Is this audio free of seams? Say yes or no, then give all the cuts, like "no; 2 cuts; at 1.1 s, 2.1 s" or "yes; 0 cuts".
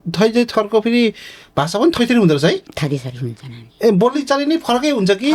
yes; 0 cuts